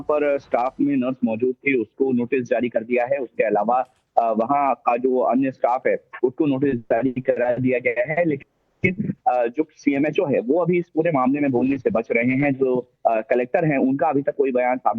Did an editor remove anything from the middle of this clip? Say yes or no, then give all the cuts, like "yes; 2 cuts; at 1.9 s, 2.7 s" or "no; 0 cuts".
yes; 1 cut; at 13.6 s